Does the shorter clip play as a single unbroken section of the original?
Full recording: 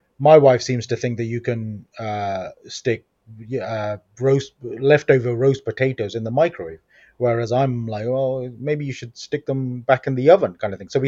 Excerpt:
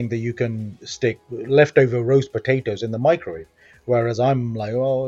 no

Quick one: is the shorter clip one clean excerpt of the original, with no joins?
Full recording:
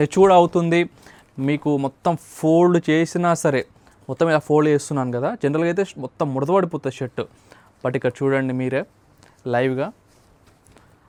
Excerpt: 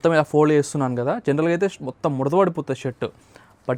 yes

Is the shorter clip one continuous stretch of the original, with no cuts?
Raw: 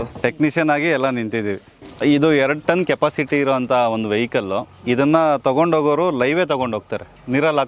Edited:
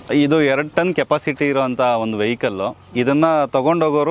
yes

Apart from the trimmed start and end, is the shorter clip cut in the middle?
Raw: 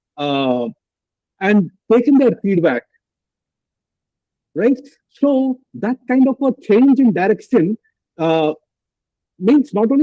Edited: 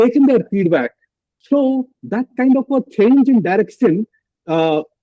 yes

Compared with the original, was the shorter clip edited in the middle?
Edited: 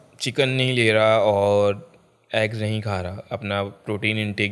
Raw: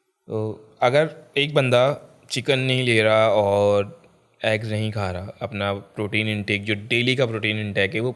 no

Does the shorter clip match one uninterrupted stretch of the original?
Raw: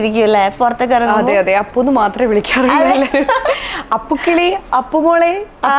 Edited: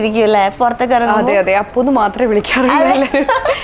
yes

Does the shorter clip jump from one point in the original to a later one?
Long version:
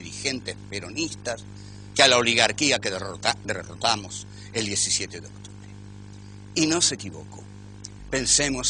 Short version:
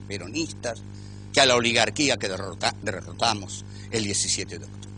no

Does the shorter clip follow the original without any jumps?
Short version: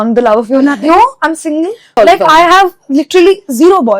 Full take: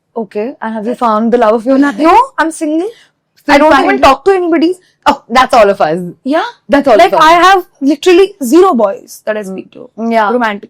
no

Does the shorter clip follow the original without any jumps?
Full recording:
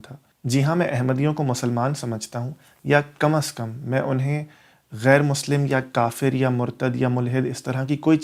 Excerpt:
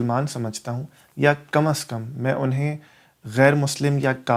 yes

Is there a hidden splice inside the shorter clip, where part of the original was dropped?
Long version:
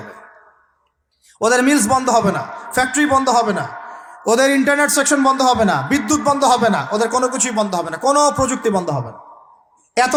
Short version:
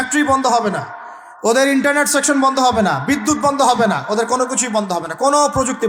no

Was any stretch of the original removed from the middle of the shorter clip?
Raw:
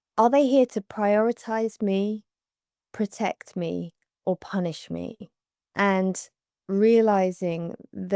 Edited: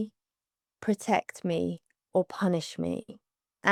no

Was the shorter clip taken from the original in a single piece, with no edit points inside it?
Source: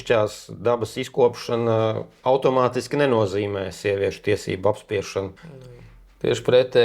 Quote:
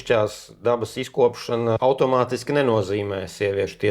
no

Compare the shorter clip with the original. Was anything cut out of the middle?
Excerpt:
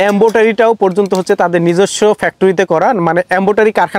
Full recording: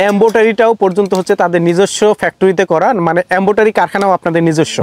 no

